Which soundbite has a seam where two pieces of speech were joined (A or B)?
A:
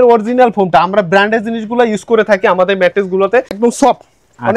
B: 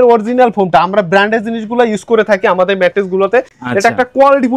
A